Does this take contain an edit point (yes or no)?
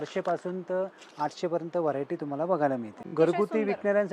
yes